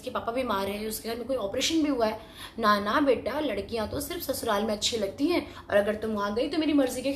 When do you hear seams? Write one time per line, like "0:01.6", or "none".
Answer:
none